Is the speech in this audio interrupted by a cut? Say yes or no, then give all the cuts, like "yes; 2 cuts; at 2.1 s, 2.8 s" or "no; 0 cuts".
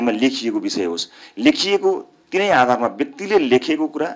no; 0 cuts